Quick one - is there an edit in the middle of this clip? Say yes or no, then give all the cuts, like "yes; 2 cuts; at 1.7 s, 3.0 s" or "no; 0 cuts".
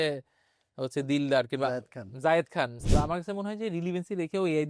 yes; 1 cut; at 2.8 s